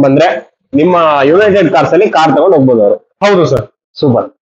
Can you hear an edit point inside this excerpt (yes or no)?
no